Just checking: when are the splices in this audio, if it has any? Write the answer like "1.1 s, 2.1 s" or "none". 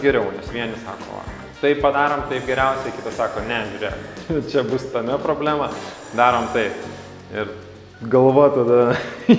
none